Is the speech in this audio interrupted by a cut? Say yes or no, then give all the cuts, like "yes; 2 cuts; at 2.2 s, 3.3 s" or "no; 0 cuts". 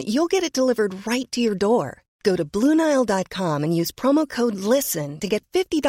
no; 0 cuts